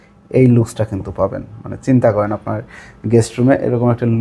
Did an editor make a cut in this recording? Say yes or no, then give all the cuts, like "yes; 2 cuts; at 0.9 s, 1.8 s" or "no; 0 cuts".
no; 0 cuts